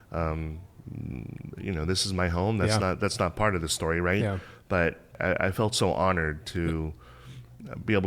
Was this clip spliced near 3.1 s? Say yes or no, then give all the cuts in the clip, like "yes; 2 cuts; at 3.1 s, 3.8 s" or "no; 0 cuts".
no; 1 cut; at 5.1 s